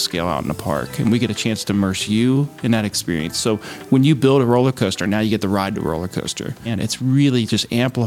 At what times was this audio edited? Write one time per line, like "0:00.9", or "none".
0:06.7